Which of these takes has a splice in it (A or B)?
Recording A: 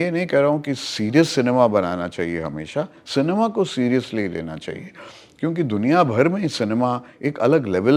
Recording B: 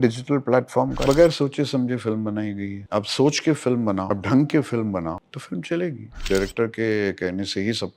B